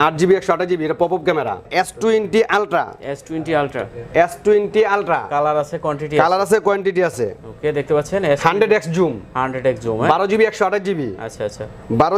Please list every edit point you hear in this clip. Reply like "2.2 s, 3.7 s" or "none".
1.6 s